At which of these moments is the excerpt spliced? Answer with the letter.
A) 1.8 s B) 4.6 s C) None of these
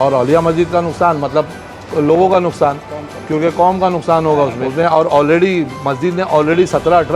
B